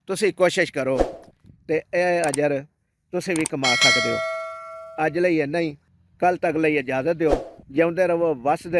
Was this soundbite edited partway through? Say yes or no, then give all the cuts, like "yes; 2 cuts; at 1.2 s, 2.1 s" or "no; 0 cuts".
no; 0 cuts